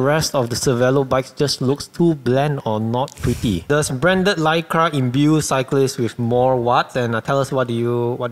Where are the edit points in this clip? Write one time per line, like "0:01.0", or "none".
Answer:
0:03.6